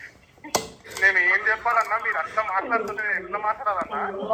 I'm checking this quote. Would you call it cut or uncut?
uncut